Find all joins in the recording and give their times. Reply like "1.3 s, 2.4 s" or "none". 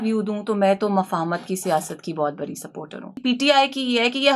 3.2 s